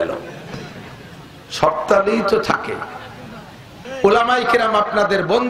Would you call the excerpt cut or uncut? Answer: cut